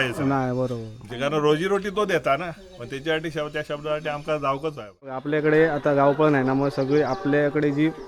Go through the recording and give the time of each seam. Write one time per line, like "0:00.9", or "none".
0:05.2